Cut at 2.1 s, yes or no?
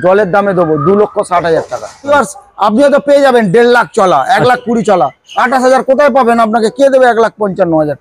yes